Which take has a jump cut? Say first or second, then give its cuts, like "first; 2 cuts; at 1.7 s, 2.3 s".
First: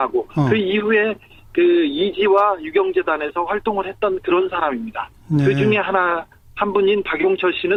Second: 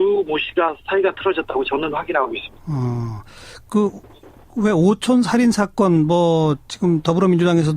second; 1 cut; at 6.2 s